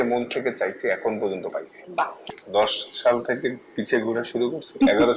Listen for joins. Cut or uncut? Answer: cut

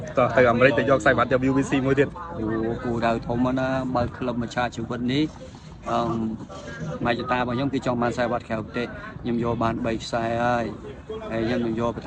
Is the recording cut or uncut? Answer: uncut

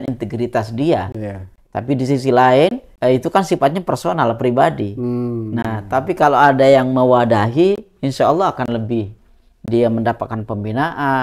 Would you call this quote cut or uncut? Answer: uncut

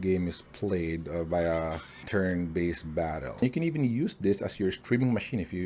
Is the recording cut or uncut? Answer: cut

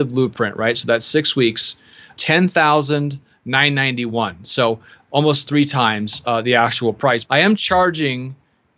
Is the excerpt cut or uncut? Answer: cut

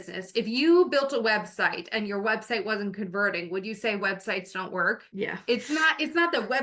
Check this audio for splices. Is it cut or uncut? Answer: cut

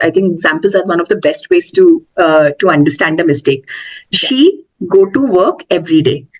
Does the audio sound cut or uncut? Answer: uncut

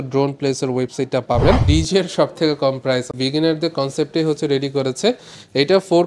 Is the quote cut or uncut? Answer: cut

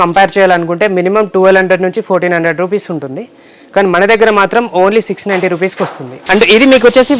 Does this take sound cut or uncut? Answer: cut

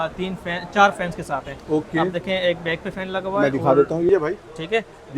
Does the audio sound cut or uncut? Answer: cut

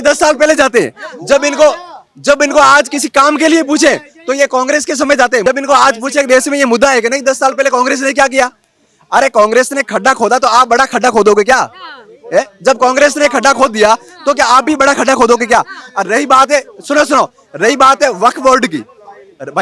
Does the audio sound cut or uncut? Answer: uncut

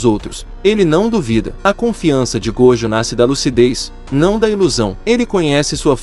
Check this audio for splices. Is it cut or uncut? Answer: cut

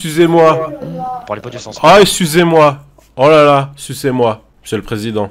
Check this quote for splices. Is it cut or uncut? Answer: uncut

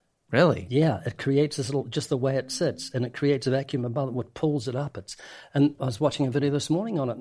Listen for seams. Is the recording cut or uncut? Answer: cut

